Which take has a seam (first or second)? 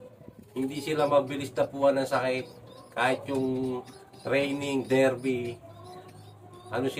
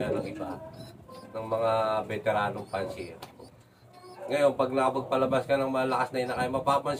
second